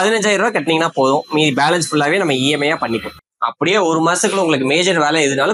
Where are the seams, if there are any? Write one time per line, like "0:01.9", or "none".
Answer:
0:03.2